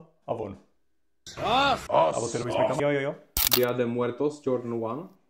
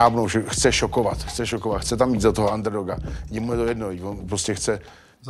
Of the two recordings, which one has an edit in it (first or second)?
first